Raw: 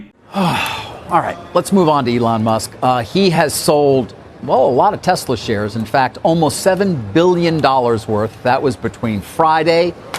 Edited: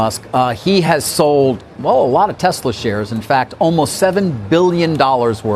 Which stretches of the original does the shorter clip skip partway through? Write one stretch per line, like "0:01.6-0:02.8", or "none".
0:04.2-0:04.3